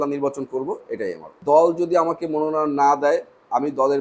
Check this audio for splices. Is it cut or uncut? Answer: cut